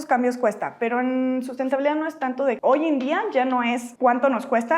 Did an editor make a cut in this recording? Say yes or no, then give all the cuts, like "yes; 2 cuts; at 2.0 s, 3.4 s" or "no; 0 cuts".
yes; 2 cuts; at 2.6 s, 3.9 s